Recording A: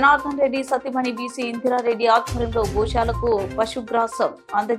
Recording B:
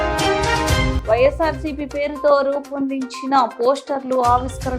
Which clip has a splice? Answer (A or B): B